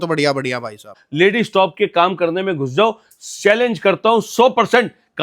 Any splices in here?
yes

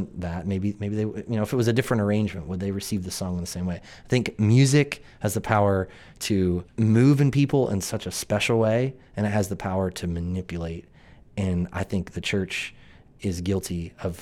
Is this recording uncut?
no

